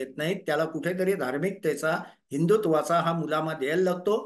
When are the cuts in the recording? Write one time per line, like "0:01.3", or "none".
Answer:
none